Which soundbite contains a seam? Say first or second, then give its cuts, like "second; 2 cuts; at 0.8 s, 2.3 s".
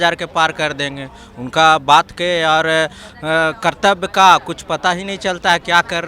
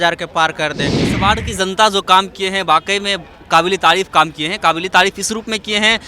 second; 1 cut; at 1.1 s